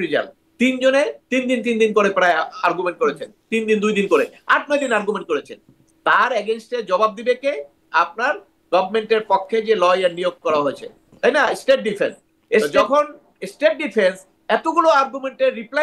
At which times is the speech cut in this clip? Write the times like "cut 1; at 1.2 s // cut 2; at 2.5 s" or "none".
cut 1; at 12.8 s